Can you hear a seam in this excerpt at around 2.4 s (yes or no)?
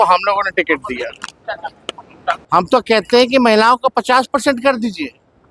yes